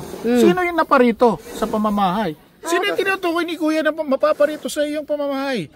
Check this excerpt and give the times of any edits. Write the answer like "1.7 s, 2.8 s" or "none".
none